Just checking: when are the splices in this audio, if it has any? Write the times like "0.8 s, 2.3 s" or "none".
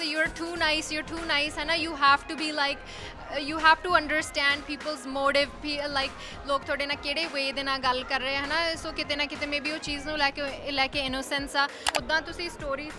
11.9 s

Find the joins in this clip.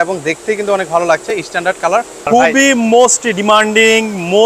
2.3 s

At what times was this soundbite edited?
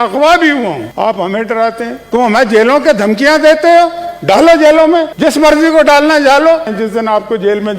2.0 s, 6.7 s

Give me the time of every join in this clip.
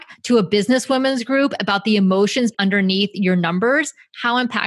2.5 s

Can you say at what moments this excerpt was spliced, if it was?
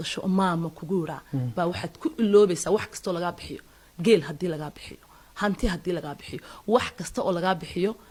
none

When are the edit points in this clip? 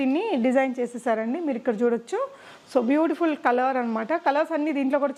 none

